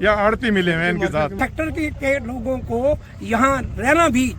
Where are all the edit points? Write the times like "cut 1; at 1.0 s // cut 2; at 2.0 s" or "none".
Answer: cut 1; at 1.3 s